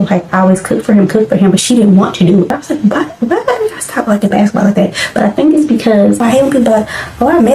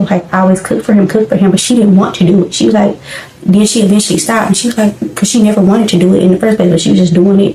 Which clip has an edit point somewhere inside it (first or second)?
first